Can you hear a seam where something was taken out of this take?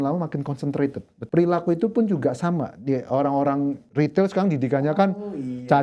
yes; 2 cuts; at 1.1 s, 3.8 s

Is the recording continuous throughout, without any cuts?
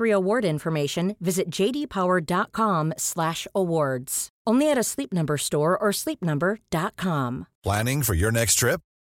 no; 1 cut; at 7.5 s

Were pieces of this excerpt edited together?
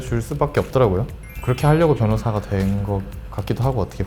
no; 0 cuts

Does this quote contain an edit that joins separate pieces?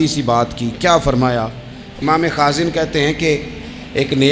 yes; 1 cut; at 1.9 s

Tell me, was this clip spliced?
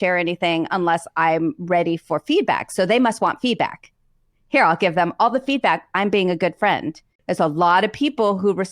yes; 1 cut; at 7.2 s

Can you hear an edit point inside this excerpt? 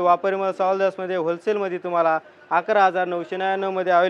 no; 0 cuts

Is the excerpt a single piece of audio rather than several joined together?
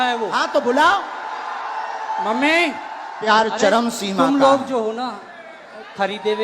no; 1 cut; at 3.2 s

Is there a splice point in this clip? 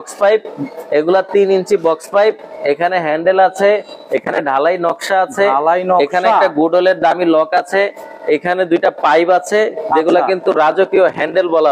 no; 0 cuts

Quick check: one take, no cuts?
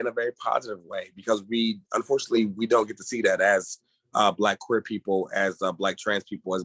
yes; 0 cuts

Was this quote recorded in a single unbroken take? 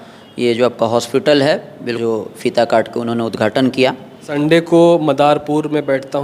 no; 2 cuts; at 1.9 s, 4.3 s

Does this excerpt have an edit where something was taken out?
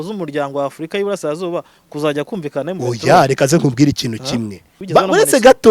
yes; 1 cut; at 4.7 s

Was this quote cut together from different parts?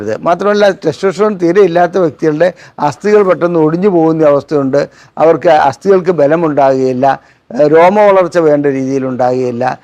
no; 0 cuts

